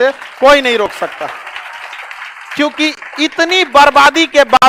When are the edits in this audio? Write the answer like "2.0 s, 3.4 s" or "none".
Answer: none